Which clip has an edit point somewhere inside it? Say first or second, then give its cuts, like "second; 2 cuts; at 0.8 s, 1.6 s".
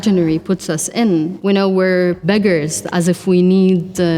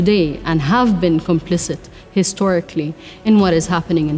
first; 2 cuts; at 1.4 s, 2.2 s